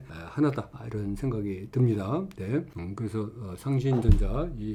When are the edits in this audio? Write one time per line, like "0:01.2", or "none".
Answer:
none